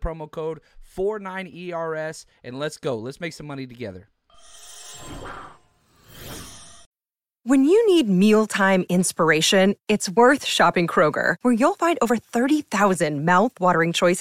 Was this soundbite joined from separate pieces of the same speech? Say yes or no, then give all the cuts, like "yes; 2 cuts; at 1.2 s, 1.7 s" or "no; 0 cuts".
yes; 1 cut; at 6.7 s